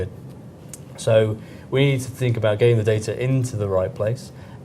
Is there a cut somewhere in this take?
yes; 1 cut; at 2.8 s

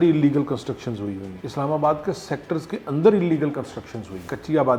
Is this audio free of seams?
yes; 0 cuts

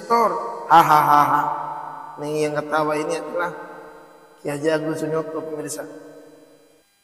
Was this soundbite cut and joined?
no; 0 cuts

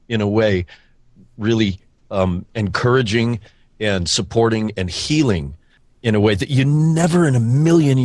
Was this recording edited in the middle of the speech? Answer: no; 0 cuts

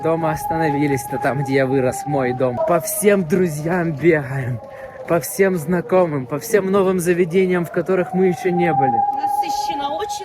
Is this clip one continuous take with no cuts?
yes; 0 cuts

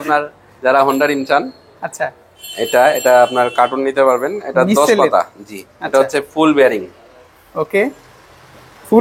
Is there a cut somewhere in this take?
no; 0 cuts

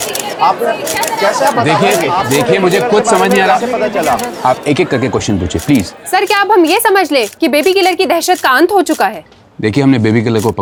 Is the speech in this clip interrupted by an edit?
no; 0 cuts

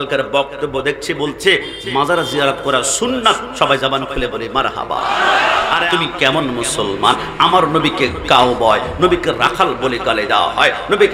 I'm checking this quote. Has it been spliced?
yes; 1 cut; at 5.9 s

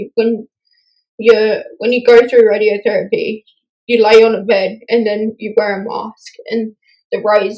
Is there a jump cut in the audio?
no; 0 cuts

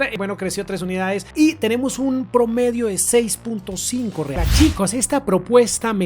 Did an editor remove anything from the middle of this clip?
yes; 1 cut; at 4.4 s

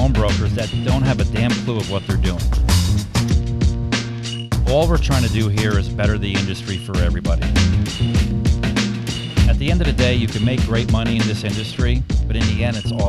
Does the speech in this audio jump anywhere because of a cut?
no; 0 cuts

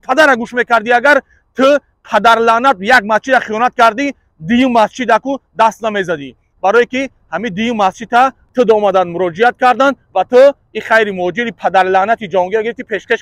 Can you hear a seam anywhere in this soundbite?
no; 0 cuts

